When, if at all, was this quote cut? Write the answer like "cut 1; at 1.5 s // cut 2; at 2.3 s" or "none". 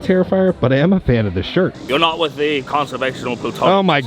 cut 1; at 1.8 s